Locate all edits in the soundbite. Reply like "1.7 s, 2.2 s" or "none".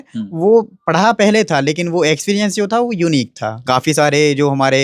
3.5 s